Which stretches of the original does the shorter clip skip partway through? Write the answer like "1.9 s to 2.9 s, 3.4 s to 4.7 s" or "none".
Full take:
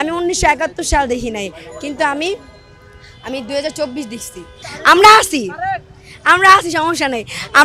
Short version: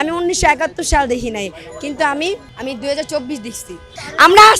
2.5 s to 3.2 s